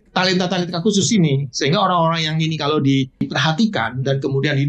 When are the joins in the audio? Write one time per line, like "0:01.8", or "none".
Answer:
0:03.3